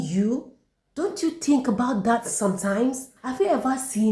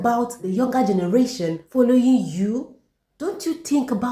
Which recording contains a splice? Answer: first; 1 cut; at 3.2 s

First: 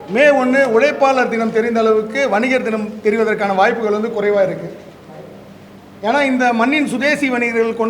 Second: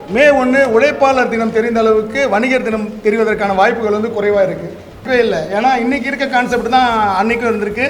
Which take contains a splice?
second; 1 cut; at 5.0 s

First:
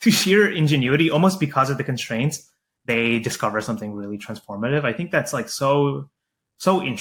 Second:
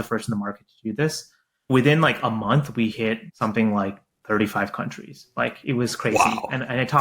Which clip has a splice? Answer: second; 2 cuts; at 1.7 s, 3.3 s

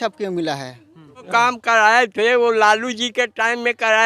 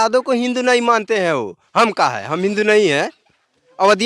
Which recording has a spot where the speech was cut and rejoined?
first; 1 cut; at 1.3 s

